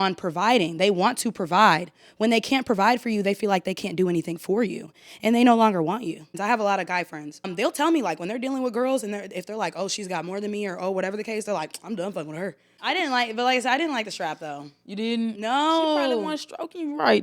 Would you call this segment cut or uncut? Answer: cut